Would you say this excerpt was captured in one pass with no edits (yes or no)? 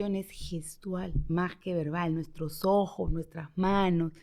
no